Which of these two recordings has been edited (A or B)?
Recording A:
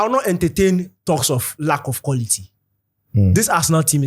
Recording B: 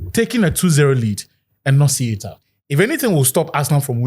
B